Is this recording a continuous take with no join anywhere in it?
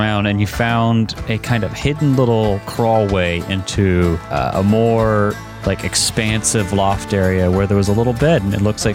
no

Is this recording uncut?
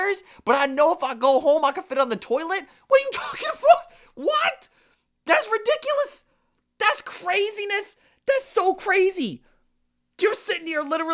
yes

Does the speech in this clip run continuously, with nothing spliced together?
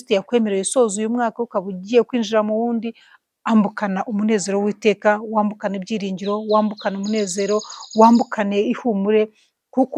yes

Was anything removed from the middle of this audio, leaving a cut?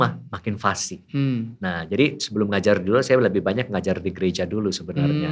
no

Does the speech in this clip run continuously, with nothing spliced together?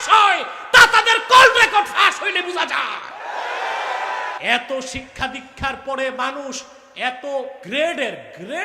no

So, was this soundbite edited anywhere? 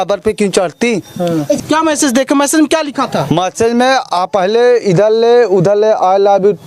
yes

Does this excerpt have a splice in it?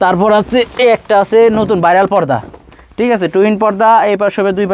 no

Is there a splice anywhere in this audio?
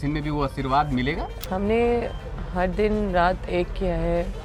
yes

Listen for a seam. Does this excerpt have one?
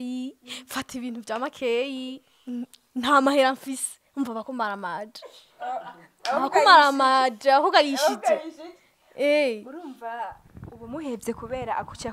no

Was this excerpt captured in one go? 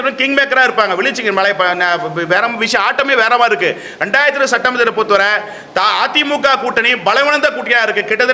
yes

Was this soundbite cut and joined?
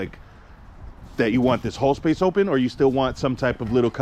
no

